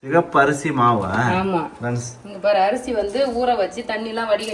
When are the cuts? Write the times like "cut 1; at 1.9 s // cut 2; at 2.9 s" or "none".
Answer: none